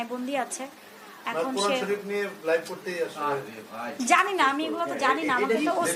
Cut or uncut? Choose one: uncut